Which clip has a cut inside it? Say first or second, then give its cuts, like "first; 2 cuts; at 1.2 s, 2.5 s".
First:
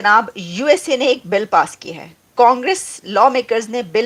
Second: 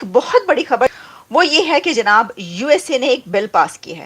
second; 1 cut; at 1.0 s